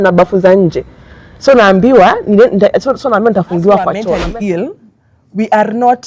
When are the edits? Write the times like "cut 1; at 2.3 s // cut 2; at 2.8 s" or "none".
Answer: cut 1; at 4.0 s